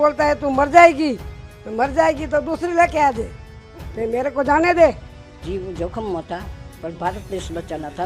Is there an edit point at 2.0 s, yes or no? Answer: no